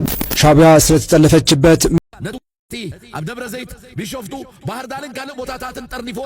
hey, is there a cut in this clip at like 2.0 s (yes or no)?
yes